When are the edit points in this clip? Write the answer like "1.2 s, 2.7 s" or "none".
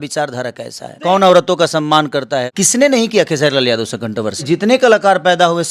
0.9 s, 2.5 s, 4.4 s